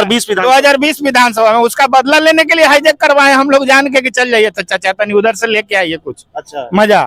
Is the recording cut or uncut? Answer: uncut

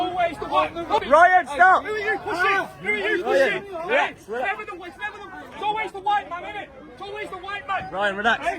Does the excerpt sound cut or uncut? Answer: cut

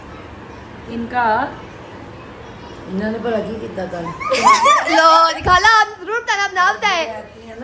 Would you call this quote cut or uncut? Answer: uncut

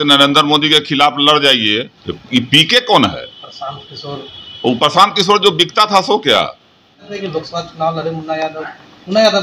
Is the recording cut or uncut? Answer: cut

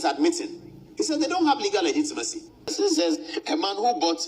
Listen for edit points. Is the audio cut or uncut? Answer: cut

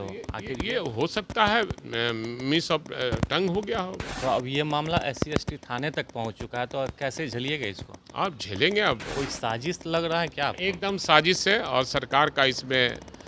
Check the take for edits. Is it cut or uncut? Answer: cut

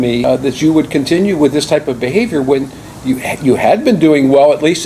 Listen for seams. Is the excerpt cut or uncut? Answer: uncut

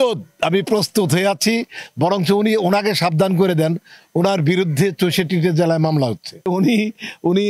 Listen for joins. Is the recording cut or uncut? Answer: cut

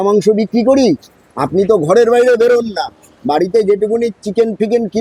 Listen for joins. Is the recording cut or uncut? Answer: uncut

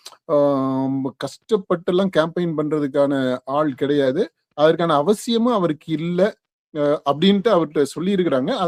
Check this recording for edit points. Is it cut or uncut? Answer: uncut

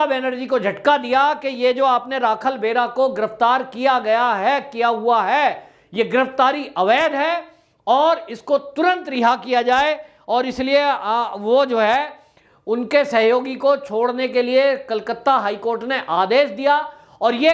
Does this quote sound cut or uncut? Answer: uncut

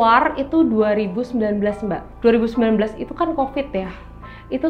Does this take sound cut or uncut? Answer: cut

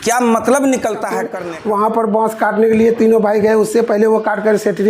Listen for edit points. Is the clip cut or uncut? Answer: cut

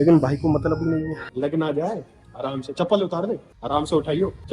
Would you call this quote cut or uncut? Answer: cut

